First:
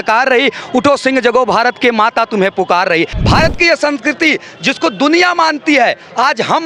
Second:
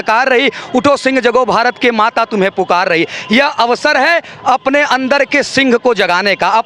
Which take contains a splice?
first; 1 cut; at 3.2 s

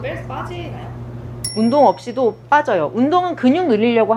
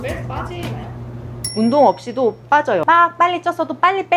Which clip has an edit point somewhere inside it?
second; 1 cut; at 2.8 s

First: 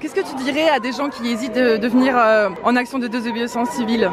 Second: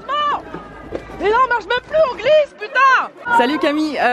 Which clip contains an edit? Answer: second; 1 cut; at 3.1 s

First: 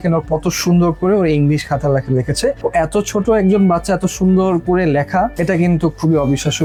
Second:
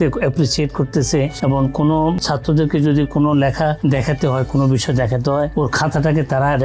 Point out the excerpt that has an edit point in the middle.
second; 1 cut; at 2.2 s

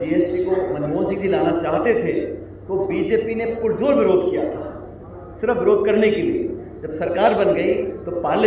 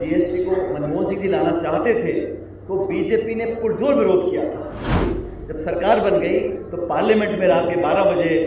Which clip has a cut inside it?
second; 1 cut; at 5.0 s

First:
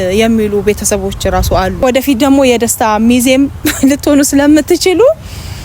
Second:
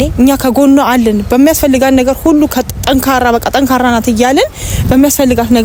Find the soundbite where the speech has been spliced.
first; 1 cut; at 1.8 s

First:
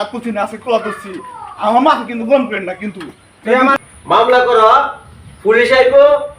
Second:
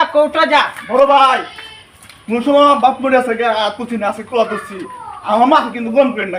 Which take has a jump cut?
first; 1 cut; at 3.7 s

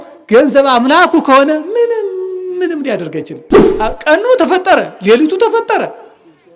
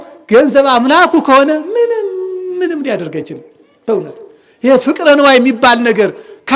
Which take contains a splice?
first; 1 cut; at 3.6 s

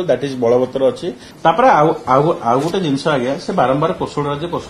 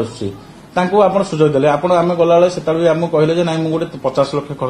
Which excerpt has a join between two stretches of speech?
first; 1 cut; at 1.2 s

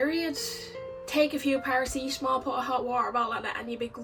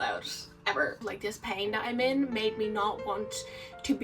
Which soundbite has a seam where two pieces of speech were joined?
second; 1 cut; at 1.0 s

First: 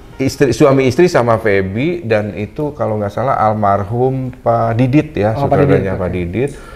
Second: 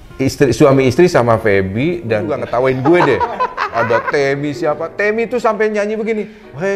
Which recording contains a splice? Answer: second; 1 cut; at 2.3 s

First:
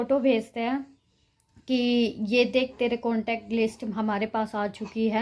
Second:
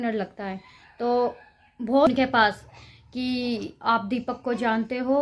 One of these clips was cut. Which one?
second; 1 cut; at 2.1 s

